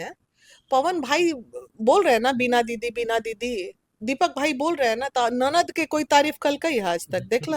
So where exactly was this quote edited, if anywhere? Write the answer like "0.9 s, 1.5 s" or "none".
none